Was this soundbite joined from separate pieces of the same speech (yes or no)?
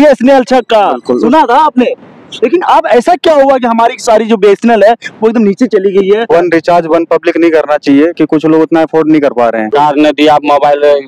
yes